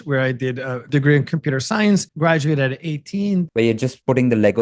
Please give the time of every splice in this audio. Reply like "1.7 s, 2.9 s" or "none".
0.8 s, 2.1 s, 3.7 s